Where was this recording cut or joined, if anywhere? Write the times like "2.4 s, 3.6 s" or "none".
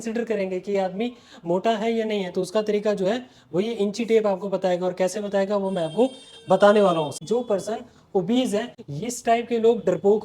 7.2 s, 8.7 s